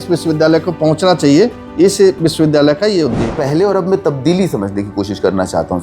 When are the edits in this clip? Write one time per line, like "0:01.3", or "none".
0:03.3